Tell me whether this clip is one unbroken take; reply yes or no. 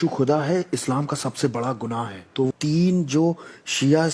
no